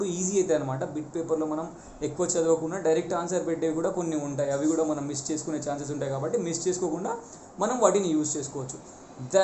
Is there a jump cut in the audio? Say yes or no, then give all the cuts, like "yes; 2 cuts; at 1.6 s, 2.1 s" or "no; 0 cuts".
no; 0 cuts